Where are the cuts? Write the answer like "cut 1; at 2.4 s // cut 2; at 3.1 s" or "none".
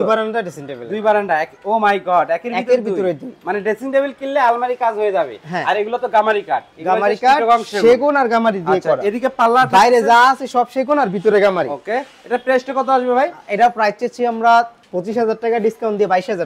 none

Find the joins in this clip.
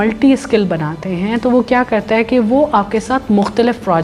none

